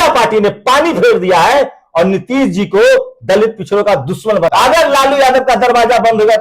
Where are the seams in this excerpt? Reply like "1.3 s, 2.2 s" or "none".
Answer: 4.5 s